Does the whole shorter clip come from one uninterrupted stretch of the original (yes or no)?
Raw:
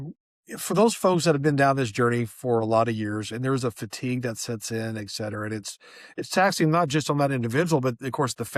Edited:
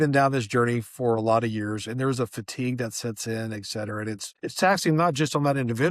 no